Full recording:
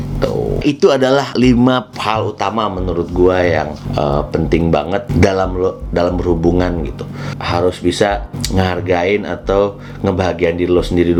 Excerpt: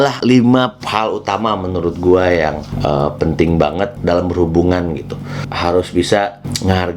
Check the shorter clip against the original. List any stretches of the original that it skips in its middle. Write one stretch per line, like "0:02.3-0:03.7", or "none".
0:05.1-0:05.8